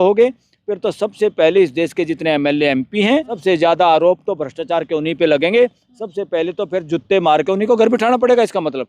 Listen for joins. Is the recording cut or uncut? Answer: cut